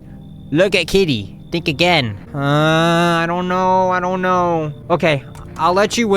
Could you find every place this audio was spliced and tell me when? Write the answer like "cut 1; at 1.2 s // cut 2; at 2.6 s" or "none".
cut 1; at 2.2 s // cut 2; at 4.8 s